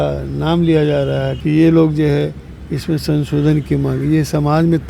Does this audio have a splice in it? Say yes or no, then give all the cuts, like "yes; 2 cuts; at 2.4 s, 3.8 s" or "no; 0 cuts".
yes; 1 cut; at 1.3 s